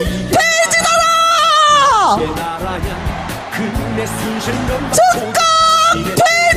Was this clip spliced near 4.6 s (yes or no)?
no